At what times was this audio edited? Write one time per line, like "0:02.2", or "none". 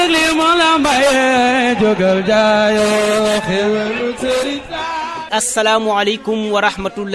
0:04.4